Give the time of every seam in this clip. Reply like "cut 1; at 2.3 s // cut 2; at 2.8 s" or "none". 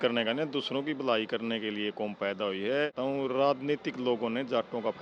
cut 1; at 2.9 s